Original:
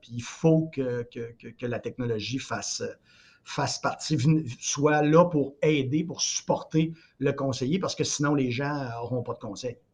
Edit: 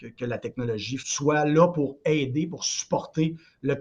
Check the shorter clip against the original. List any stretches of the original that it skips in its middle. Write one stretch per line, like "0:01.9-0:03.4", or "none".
0:02.5-0:04.6

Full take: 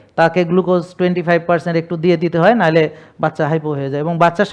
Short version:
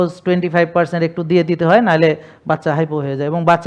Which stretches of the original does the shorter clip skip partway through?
none

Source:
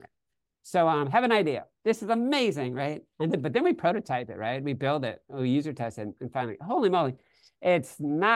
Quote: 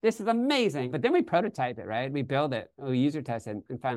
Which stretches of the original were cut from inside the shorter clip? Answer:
0:02.8-0:03.4

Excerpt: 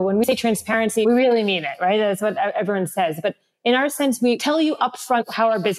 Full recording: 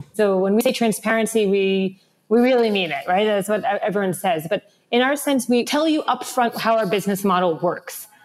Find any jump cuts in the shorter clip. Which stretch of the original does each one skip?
0:01.3-0:02.2

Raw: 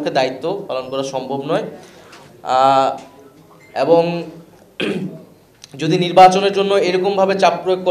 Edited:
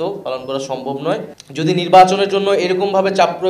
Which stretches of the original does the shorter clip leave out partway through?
0:01.8-0:05.6

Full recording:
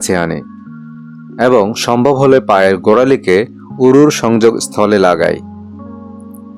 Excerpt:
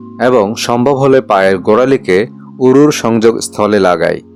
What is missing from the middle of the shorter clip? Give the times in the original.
none

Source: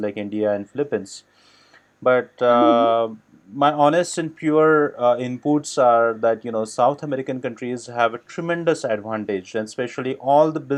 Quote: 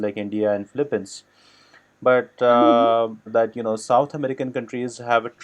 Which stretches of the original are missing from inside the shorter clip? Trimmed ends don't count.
0:03.3-0:06.2

